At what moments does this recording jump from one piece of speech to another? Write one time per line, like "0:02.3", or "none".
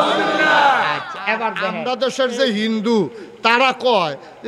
0:01.7